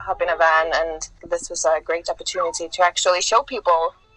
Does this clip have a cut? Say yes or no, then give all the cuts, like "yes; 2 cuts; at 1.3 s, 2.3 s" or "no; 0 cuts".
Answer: yes; 1 cut; at 1.1 s